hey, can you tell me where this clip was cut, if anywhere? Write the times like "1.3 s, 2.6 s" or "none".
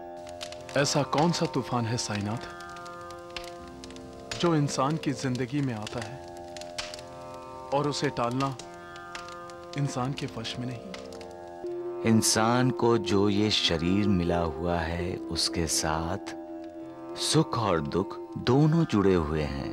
11.6 s